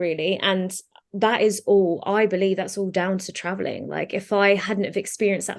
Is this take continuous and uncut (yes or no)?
yes